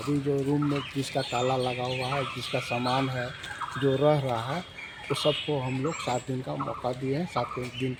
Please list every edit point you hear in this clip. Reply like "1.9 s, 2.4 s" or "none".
none